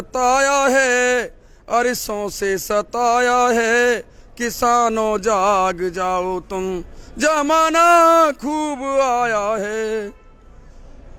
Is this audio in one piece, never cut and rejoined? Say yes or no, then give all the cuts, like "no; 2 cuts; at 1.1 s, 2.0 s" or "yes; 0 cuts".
yes; 0 cuts